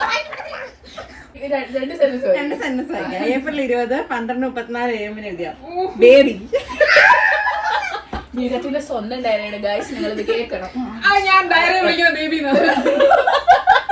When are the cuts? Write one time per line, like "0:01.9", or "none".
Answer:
0:01.4